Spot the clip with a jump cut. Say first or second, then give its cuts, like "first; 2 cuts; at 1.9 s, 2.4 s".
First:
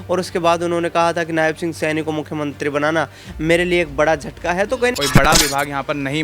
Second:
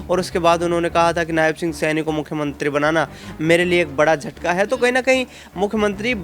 first; 1 cut; at 4.9 s